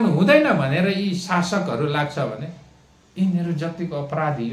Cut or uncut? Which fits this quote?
uncut